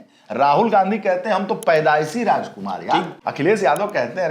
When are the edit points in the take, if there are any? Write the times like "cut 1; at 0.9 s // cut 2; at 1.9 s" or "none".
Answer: cut 1; at 3.2 s